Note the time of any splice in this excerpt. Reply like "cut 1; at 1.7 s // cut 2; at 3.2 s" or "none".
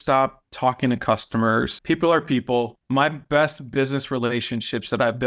cut 1; at 1.8 s // cut 2; at 2.8 s